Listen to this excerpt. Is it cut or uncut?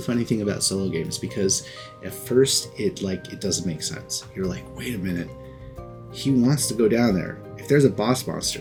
uncut